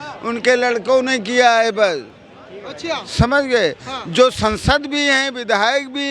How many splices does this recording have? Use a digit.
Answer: 0